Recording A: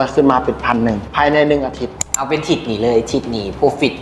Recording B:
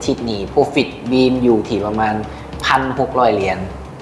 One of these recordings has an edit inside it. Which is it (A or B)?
A